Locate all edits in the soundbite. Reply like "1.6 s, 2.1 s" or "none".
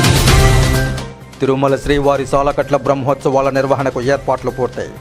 1.0 s